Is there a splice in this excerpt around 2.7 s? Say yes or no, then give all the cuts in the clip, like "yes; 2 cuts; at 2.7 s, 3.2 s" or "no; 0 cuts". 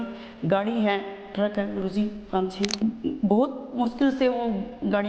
yes; 1 cut; at 2.7 s